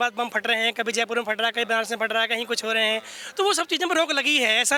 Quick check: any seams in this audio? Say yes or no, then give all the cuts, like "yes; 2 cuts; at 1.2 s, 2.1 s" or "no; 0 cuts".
no; 0 cuts